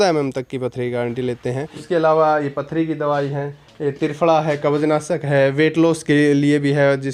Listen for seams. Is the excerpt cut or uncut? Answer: cut